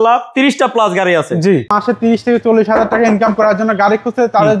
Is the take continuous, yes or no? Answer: no